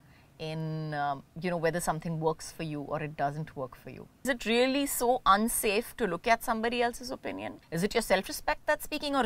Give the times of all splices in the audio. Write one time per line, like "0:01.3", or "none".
0:04.3
0:07.6